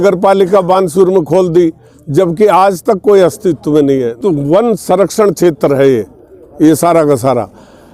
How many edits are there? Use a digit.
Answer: 1